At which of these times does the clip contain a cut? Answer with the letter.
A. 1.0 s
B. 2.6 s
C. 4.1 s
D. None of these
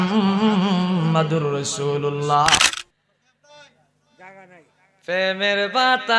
B